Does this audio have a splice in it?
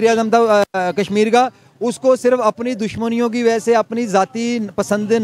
no; 0 cuts

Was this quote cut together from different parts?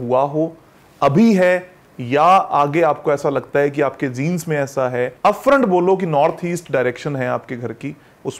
yes; 1 cut; at 5.1 s

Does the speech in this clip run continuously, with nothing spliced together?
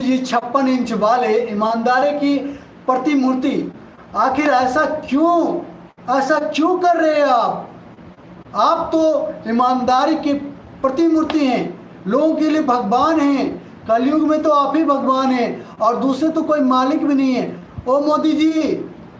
yes; 0 cuts

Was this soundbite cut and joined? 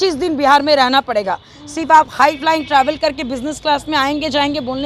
no; 0 cuts

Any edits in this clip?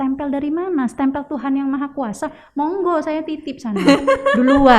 no; 0 cuts

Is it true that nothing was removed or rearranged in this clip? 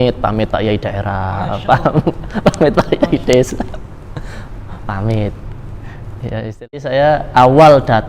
no; 1 cut; at 6.7 s

